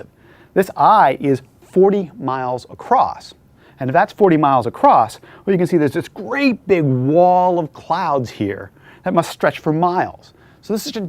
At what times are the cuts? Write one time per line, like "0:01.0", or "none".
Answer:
0:07.4